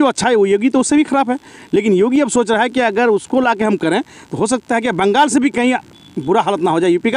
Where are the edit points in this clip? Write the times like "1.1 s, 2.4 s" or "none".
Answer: none